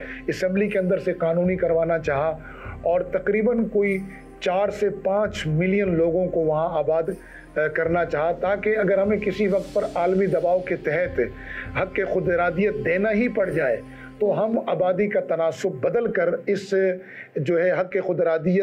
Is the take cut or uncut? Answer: uncut